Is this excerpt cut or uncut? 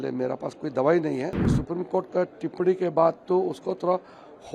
cut